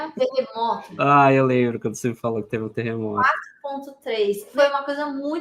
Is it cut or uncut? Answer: uncut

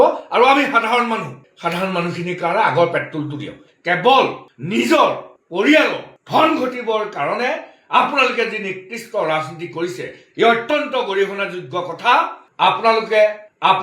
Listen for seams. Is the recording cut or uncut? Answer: cut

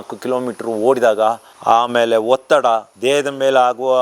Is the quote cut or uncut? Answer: uncut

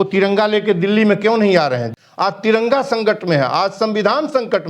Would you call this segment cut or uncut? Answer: cut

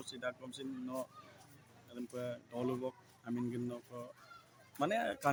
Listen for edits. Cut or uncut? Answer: uncut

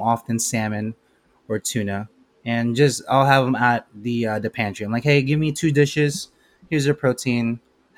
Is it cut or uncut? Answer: uncut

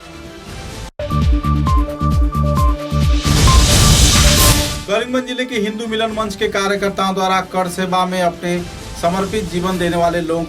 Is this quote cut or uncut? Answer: cut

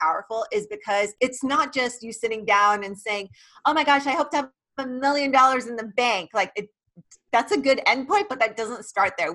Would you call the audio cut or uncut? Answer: cut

